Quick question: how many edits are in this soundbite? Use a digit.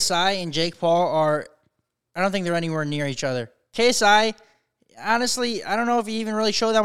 0